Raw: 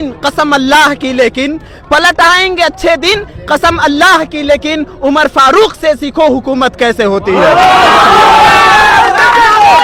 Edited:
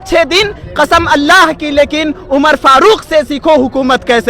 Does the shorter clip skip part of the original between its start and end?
no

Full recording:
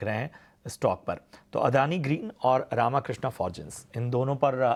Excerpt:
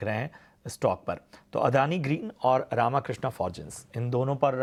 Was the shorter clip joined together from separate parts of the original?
no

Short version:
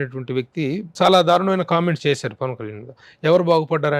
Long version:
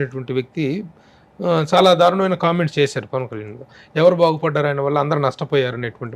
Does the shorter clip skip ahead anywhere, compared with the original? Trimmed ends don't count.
yes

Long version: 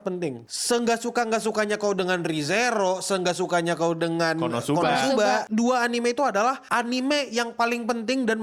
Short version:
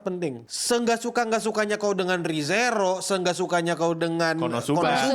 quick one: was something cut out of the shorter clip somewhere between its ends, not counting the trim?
no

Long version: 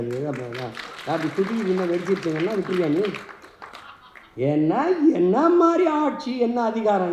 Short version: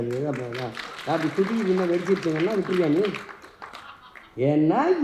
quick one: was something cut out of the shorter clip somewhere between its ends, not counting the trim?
no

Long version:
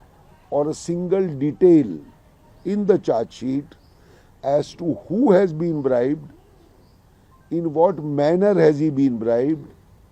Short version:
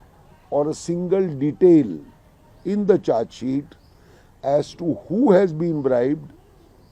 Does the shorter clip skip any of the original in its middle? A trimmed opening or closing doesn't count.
no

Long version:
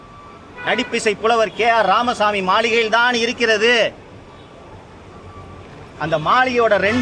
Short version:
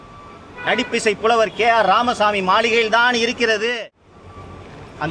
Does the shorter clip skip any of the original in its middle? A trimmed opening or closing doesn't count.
yes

